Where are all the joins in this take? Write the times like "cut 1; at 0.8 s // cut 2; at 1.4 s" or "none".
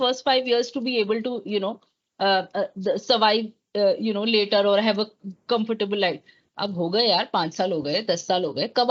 none